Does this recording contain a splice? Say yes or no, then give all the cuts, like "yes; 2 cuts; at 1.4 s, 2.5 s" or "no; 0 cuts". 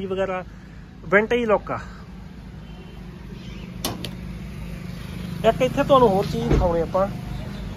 no; 0 cuts